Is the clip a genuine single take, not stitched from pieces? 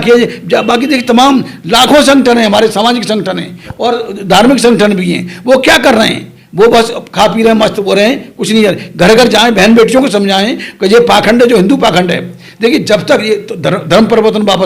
yes; 0 cuts

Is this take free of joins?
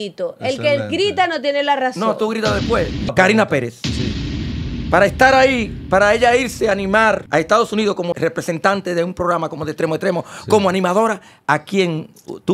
no; 3 cuts; at 3.1 s, 7.2 s, 8.2 s

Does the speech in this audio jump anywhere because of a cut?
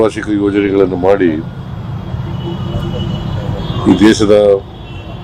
no; 0 cuts

